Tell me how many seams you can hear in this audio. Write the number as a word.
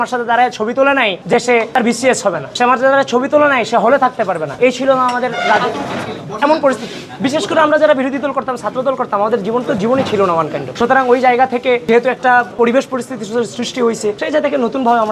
zero